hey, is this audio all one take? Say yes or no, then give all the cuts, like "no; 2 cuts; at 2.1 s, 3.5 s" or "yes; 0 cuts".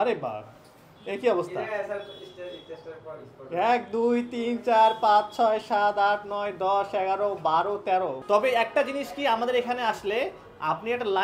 no; 1 cut; at 8.2 s